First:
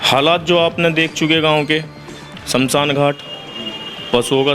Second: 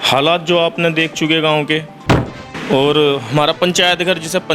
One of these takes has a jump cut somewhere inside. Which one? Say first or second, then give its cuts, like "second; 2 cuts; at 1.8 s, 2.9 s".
second; 1 cut; at 2.4 s